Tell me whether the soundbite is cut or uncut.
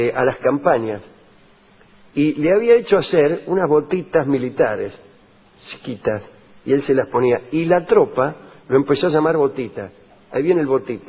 uncut